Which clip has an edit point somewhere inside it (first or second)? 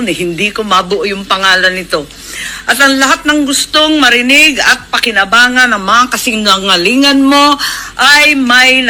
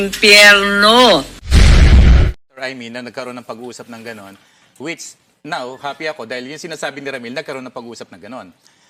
second